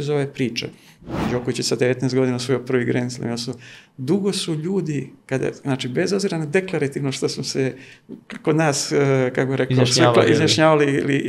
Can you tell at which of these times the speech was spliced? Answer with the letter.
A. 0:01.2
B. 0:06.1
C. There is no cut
A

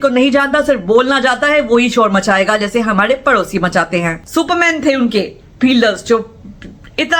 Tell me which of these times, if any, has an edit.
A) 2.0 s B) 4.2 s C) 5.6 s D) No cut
B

